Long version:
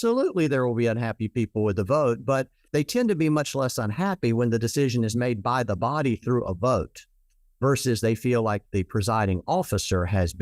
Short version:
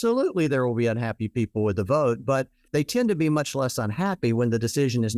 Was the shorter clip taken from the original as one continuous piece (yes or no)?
yes